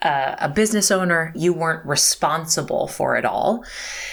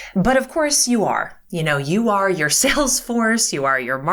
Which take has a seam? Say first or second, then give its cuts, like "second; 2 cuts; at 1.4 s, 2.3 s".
first; 1 cut; at 1.3 s